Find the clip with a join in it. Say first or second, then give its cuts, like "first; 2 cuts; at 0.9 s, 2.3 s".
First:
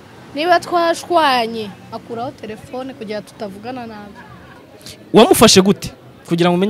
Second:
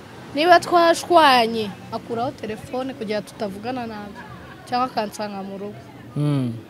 first; 1 cut; at 4.6 s